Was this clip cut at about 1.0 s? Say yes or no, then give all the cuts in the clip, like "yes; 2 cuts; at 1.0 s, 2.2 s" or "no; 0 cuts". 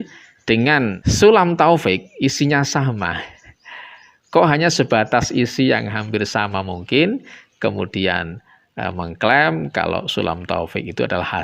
yes; 1 cut; at 1.0 s